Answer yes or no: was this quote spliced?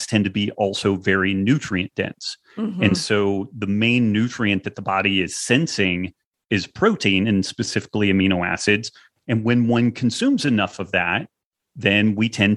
no